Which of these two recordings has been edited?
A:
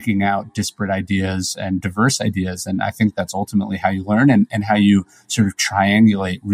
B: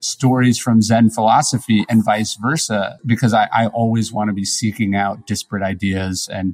B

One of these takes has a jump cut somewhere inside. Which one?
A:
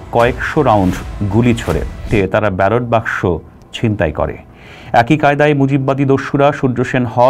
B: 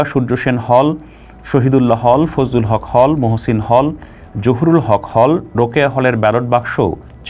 A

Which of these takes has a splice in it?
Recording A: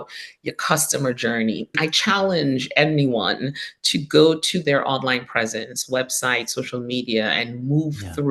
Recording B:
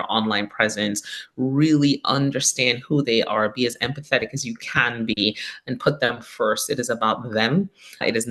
A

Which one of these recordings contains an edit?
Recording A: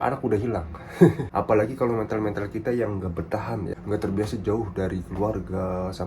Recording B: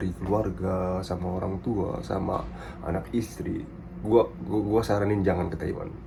A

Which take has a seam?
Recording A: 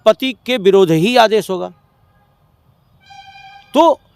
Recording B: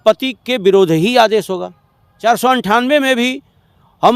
B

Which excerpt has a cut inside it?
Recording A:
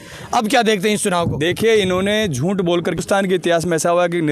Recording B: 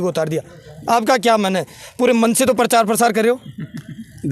A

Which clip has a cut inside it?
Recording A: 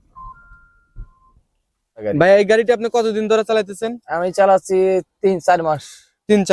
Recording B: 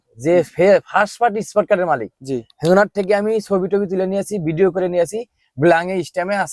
A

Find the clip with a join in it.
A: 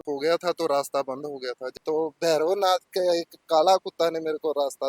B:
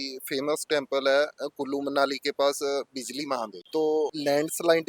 A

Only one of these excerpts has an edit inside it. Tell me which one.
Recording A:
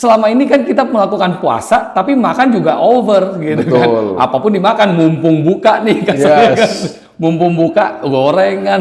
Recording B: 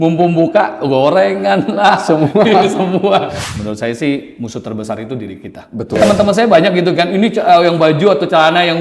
B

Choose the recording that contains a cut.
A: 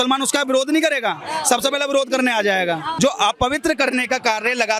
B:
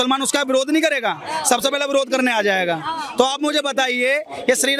A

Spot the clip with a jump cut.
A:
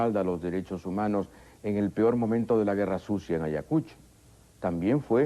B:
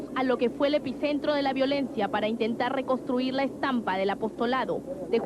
B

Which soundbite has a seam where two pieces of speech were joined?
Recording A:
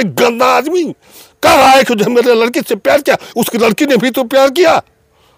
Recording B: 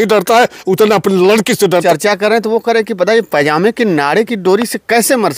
B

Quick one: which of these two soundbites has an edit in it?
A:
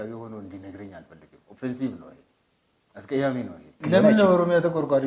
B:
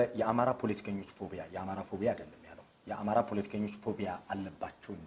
A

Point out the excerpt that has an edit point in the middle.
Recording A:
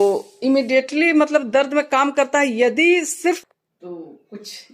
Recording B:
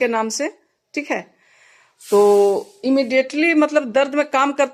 A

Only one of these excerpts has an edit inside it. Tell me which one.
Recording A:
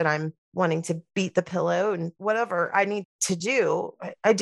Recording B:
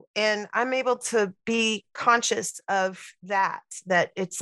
A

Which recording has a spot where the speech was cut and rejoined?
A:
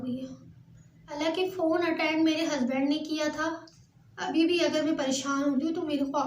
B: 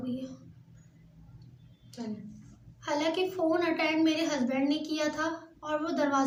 A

